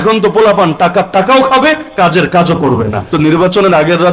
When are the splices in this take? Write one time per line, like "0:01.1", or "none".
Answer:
0:03.0